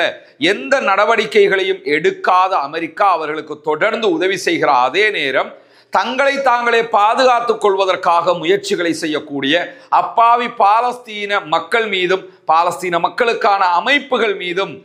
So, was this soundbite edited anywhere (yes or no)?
no